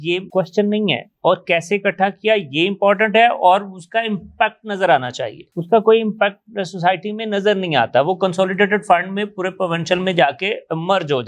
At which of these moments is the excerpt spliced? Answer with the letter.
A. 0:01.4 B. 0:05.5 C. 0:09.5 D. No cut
D